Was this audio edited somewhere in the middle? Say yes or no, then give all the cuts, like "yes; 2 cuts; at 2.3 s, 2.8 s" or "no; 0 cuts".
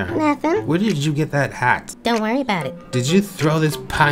no; 0 cuts